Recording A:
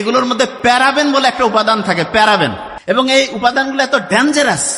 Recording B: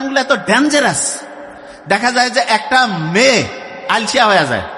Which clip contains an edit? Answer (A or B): A